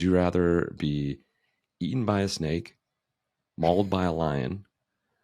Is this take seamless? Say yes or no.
yes